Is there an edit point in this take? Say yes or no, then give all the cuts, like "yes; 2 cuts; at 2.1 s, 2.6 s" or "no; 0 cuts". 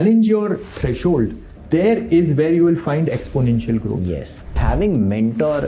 yes; 2 cuts; at 1.5 s, 4.6 s